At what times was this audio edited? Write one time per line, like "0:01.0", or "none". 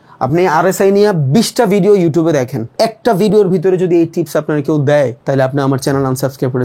0:02.6
0:05.2